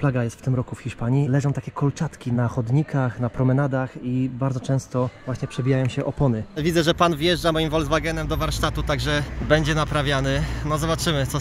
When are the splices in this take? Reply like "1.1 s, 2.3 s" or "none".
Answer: 1.3 s, 5.2 s, 6.6 s